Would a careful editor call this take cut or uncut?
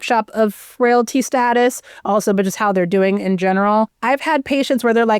cut